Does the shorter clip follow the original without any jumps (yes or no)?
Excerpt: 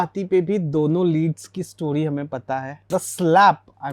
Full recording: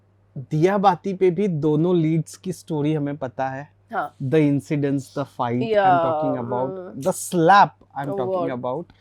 no